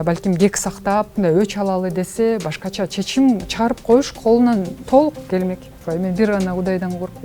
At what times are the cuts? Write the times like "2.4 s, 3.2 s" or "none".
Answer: 1.1 s, 4.8 s, 5.7 s